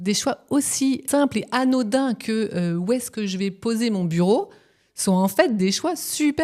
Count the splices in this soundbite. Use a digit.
1